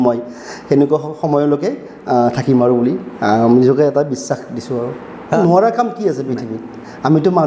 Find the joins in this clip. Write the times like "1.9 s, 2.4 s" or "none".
5.4 s